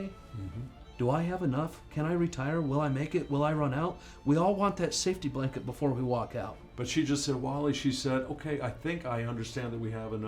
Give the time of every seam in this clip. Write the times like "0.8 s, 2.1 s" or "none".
6.6 s